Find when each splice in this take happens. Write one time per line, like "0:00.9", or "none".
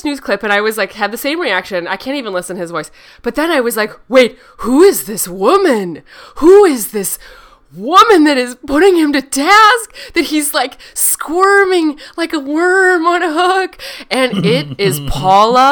none